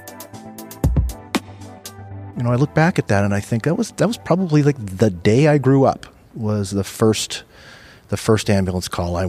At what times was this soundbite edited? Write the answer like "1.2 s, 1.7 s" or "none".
1.8 s